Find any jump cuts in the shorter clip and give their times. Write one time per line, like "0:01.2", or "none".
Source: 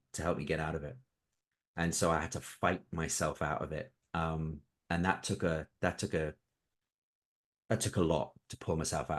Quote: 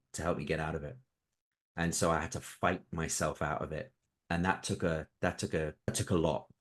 0:04.0
0:05.9